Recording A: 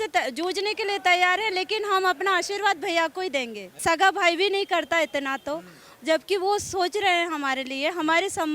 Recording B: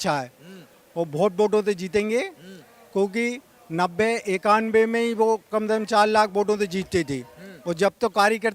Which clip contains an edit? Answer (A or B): A